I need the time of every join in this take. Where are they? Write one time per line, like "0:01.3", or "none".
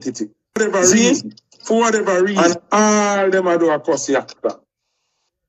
0:02.3